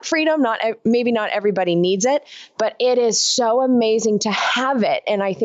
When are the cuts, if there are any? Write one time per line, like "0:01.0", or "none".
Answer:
none